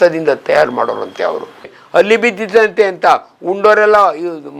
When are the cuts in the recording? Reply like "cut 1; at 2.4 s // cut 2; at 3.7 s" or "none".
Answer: cut 1; at 1.8 s